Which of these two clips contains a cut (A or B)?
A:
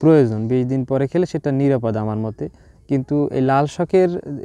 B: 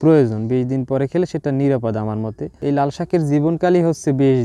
B